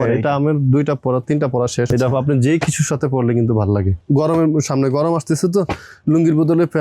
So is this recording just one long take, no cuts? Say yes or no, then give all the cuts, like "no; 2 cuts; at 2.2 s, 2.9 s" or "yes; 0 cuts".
no; 2 cuts; at 1.9 s, 3.9 s